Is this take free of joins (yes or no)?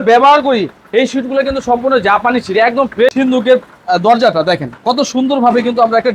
no